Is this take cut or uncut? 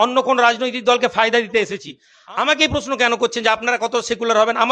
cut